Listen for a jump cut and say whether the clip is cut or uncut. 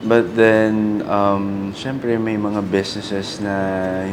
uncut